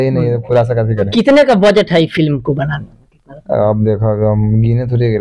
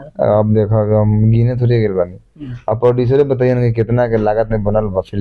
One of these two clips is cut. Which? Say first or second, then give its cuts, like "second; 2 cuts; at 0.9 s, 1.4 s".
first; 1 cut; at 1.1 s